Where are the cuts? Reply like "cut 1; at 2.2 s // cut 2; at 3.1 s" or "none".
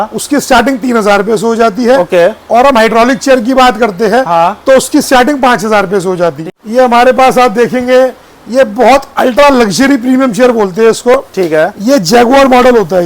cut 1; at 6.4 s